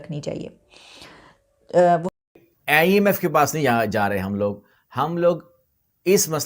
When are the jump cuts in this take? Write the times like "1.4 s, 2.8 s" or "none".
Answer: 2.4 s